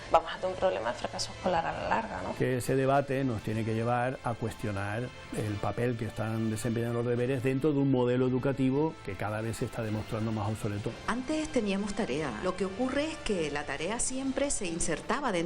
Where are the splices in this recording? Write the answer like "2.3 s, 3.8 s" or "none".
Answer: 2.3 s, 10.9 s, 12.4 s